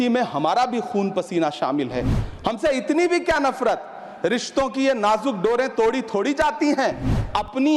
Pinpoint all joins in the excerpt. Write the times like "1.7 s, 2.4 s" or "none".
none